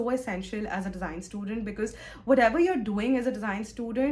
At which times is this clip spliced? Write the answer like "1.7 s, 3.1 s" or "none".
none